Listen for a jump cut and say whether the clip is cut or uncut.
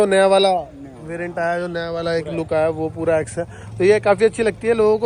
uncut